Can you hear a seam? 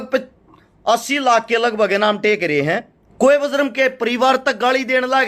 yes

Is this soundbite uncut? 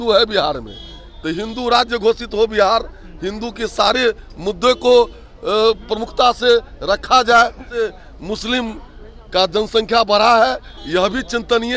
no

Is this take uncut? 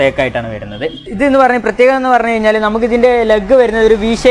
no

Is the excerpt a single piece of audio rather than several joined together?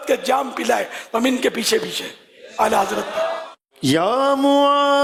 yes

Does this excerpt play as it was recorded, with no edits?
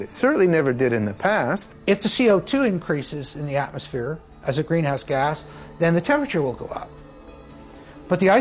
no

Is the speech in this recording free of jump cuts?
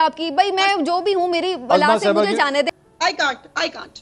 no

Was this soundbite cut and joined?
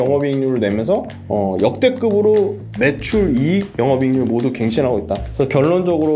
yes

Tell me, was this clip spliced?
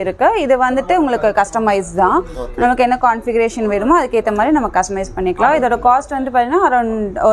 no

